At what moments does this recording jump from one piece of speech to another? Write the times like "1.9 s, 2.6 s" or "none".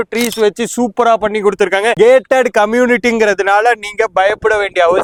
none